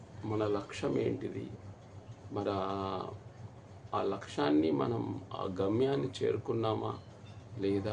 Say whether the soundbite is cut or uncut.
uncut